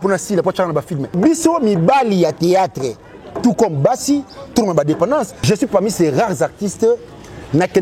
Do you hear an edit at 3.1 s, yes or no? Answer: no